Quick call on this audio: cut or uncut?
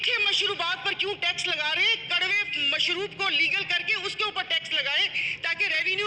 uncut